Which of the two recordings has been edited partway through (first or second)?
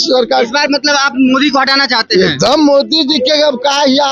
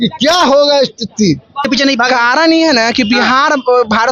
second